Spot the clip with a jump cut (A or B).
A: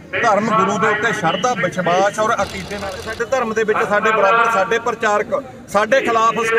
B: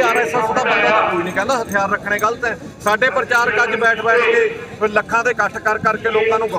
A